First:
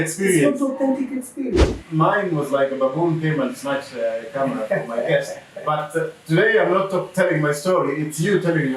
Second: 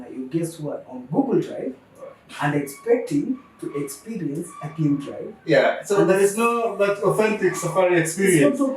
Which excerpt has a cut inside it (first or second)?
first